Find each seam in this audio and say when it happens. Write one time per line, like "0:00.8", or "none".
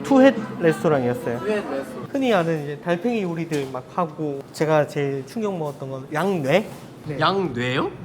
0:02.0
0:06.0
0:07.0